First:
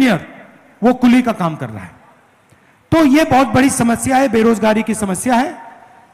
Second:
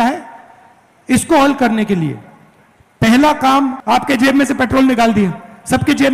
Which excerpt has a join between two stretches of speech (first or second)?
second